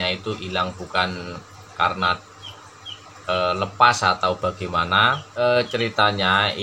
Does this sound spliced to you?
yes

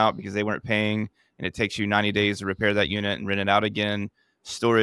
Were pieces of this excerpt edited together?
no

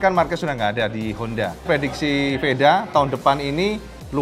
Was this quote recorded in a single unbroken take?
no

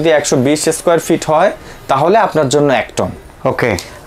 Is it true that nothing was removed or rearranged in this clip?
yes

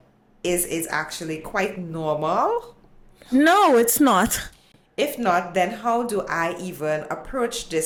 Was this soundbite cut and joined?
no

